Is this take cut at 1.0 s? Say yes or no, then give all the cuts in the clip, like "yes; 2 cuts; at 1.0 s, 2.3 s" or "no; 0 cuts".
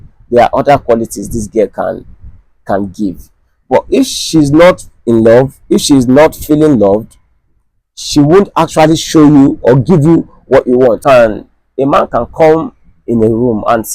no; 1 cut; at 11.0 s